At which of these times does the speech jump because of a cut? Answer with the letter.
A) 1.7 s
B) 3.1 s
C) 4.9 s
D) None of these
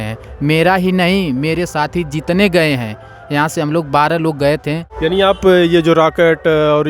C